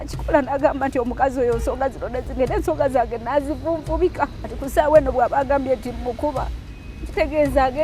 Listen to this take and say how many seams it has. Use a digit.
1